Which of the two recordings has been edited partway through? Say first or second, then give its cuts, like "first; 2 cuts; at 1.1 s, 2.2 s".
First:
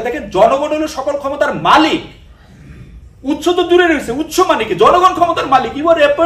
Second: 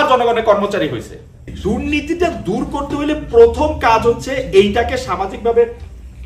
second; 1 cut; at 1.5 s